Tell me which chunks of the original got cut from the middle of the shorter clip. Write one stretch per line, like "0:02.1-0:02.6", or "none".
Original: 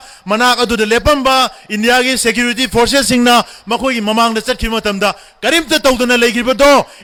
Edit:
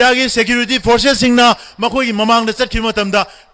none